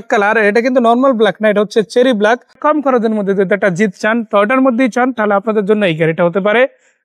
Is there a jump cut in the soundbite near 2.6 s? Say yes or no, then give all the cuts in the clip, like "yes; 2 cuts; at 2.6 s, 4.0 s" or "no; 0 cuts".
yes; 1 cut; at 2.6 s